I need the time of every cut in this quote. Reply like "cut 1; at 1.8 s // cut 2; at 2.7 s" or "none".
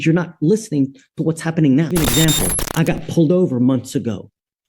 cut 1; at 1.9 s